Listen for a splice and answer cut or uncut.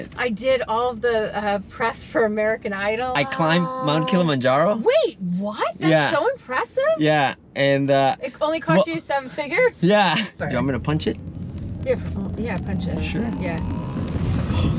cut